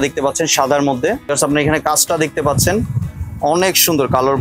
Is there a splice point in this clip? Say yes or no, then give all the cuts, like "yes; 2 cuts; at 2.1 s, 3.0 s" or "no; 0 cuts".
yes; 1 cut; at 1.3 s